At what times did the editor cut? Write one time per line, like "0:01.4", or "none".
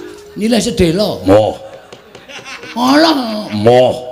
none